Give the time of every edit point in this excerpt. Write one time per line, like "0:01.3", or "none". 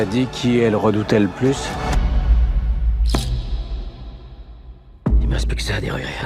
0:01.9